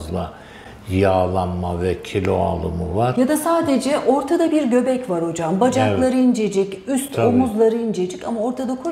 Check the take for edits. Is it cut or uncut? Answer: uncut